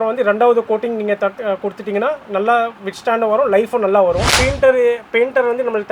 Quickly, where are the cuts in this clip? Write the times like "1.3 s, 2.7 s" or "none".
4.3 s